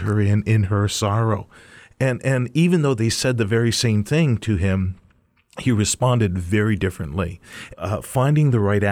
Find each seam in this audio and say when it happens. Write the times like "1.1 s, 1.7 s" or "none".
7.6 s